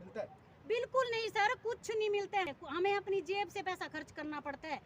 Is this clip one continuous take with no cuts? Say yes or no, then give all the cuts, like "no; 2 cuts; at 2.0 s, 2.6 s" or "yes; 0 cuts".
no; 1 cut; at 2.5 s